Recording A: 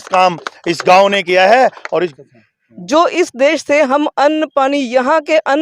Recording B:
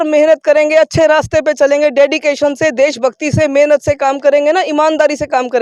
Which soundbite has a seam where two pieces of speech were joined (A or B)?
A